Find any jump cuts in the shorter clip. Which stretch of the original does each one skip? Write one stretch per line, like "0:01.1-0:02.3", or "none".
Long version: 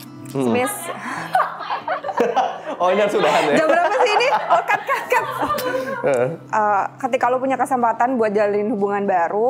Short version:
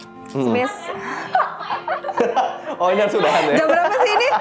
none